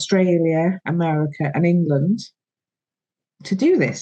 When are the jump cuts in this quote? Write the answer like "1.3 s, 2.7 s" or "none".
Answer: none